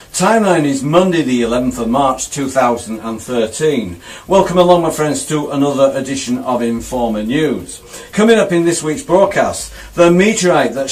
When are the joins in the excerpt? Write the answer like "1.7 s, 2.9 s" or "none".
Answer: none